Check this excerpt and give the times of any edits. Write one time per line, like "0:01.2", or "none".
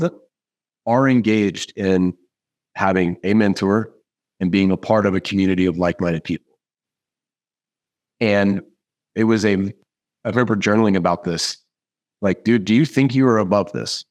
none